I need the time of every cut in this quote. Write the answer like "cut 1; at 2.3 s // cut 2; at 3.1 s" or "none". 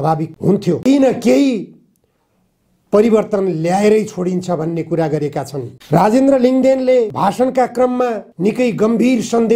cut 1; at 0.8 s // cut 2; at 8.3 s